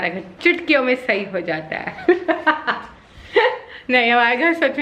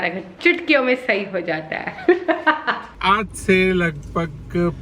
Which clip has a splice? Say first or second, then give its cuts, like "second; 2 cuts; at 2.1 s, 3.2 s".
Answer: second; 1 cut; at 2.8 s